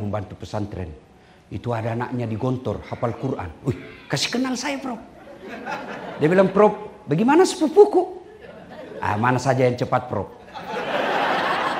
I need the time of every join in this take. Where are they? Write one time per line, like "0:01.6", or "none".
none